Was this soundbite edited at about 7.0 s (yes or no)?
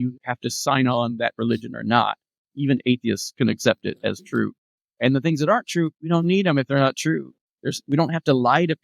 no